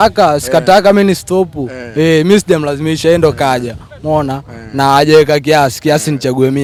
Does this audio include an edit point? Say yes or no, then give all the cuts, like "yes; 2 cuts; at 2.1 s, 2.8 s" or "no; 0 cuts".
no; 0 cuts